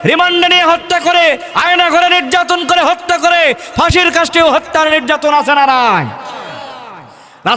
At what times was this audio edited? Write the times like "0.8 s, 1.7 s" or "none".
none